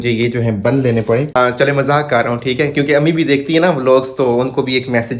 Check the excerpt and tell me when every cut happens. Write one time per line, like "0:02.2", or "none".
0:01.3